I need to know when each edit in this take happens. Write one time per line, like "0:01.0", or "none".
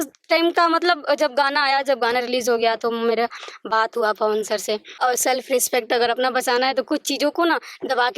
0:05.0